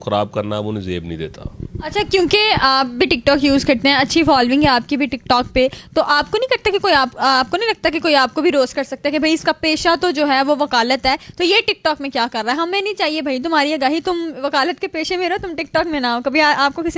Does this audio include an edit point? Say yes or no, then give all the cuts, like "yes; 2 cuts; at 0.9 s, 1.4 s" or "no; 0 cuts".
no; 0 cuts